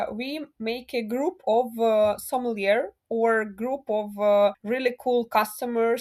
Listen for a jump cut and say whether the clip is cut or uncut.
uncut